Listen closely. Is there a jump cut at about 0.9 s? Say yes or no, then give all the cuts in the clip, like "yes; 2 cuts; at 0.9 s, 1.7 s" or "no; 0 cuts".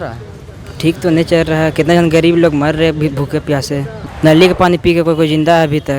no; 1 cut; at 4.0 s